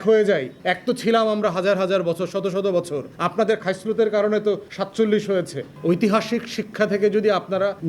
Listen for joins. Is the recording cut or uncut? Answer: cut